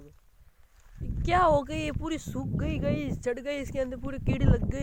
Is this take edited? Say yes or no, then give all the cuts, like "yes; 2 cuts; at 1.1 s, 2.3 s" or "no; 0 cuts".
no; 0 cuts